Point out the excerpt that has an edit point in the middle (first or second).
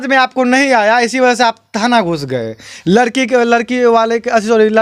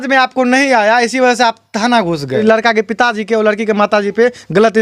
second